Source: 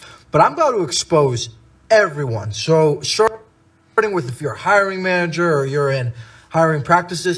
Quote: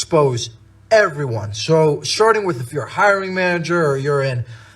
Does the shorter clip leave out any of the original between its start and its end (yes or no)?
yes